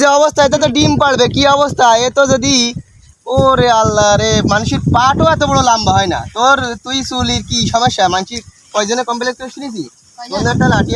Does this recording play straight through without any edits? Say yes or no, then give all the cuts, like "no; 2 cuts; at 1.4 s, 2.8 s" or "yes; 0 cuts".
yes; 0 cuts